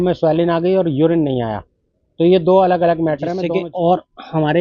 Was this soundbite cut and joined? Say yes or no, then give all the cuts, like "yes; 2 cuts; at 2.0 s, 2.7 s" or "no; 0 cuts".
yes; 1 cut; at 3.4 s